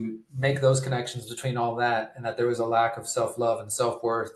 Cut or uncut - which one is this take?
uncut